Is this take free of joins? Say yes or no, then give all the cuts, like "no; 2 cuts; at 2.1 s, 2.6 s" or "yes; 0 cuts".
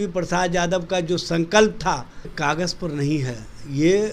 no; 1 cut; at 2.3 s